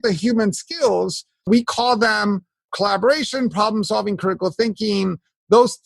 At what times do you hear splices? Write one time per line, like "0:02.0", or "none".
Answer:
0:01.5
0:02.7